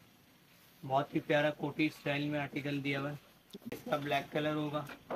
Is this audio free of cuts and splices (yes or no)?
no